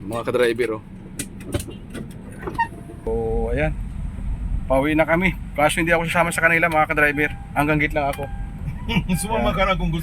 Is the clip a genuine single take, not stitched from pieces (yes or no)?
no